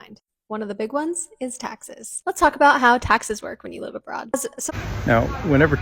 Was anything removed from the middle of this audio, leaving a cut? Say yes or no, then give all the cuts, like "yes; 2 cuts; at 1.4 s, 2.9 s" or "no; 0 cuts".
yes; 1 cut; at 4.5 s